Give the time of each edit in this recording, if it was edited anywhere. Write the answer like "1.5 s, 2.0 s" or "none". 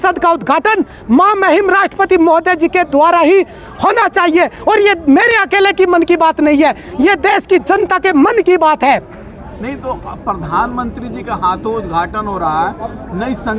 none